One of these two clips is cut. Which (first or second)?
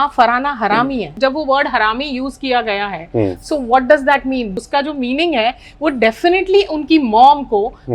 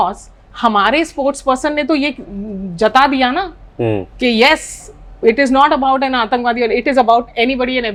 first